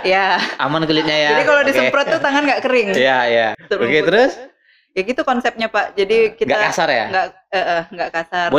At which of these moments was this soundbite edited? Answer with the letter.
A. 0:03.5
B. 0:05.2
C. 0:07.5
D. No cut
A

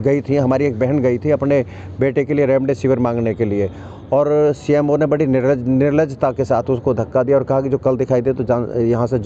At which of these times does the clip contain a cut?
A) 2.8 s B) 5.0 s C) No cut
C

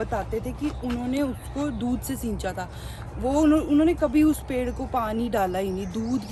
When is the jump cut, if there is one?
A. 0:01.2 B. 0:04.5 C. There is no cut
C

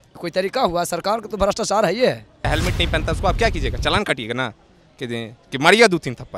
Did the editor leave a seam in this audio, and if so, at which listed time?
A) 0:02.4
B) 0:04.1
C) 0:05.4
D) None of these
A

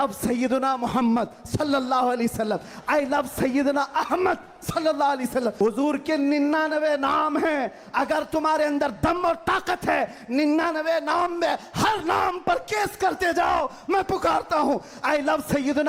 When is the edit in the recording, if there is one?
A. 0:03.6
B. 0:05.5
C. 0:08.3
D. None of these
B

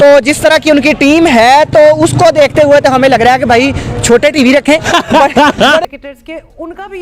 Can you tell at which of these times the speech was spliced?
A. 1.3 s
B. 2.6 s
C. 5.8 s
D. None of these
C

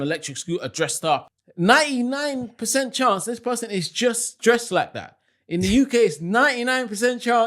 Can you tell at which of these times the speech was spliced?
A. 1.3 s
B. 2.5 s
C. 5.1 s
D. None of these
A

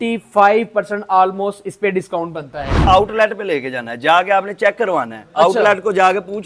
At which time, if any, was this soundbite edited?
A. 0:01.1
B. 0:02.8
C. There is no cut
B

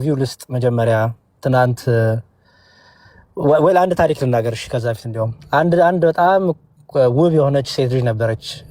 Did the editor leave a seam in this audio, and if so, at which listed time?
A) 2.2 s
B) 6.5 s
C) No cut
C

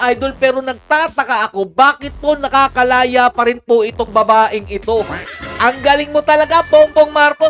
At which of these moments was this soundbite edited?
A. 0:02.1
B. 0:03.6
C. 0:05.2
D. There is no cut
C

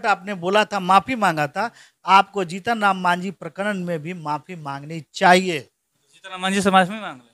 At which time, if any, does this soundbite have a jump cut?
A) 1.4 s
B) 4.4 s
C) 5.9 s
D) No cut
D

